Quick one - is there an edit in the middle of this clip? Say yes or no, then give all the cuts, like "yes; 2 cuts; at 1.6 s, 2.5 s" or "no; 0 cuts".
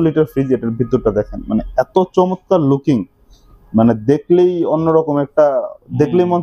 no; 0 cuts